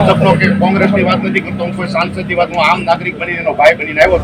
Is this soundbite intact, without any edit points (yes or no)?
yes